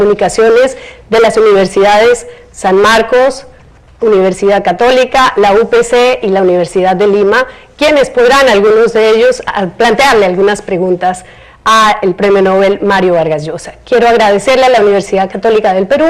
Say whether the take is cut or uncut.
cut